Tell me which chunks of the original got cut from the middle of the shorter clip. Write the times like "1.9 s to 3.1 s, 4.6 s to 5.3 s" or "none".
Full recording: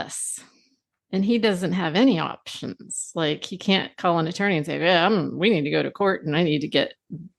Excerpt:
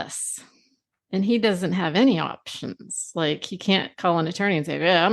none